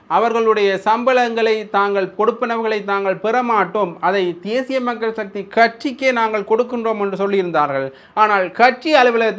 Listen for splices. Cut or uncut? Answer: uncut